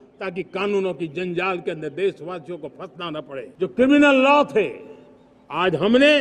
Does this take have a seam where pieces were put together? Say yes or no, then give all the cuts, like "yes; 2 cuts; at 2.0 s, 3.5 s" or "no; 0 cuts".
yes; 1 cut; at 3.5 s